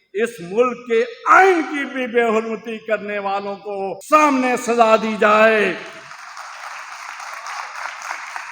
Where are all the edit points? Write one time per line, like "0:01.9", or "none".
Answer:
0:04.0